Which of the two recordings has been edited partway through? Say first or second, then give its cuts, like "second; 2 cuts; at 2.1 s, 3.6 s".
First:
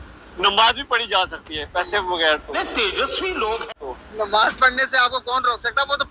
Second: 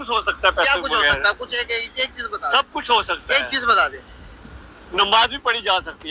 first; 2 cuts; at 2.5 s, 3.8 s